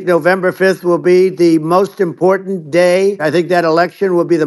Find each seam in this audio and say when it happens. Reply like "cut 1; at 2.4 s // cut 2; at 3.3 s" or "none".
cut 1; at 3.2 s